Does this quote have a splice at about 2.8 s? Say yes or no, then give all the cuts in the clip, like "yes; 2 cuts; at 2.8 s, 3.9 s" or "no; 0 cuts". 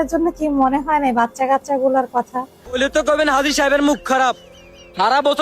yes; 1 cut; at 2.8 s